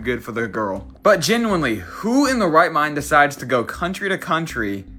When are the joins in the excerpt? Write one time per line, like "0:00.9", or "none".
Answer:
none

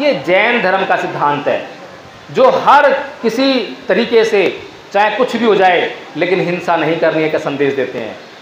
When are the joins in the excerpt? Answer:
none

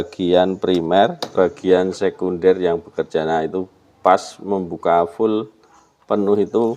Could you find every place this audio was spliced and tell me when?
0:01.3

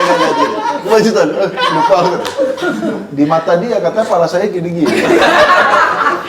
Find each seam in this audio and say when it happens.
none

